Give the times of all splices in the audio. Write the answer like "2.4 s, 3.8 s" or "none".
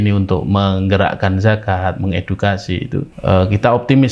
3.1 s